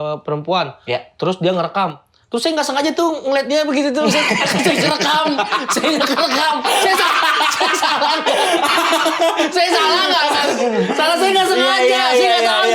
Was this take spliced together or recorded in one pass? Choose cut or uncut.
uncut